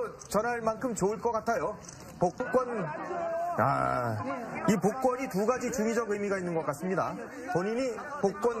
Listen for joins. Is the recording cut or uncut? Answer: cut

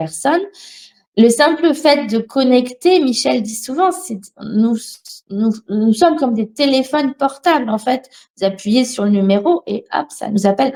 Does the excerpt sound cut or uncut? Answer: uncut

